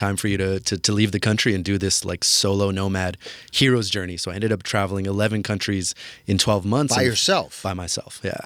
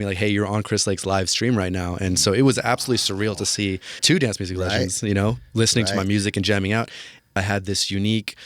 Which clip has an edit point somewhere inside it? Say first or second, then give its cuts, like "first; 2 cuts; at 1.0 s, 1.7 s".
second; 2 cuts; at 4.0 s, 7.4 s